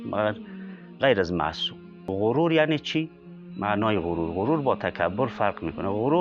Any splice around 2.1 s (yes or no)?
yes